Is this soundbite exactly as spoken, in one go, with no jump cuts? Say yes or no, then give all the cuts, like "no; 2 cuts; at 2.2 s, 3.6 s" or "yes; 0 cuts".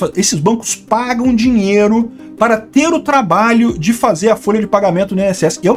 yes; 0 cuts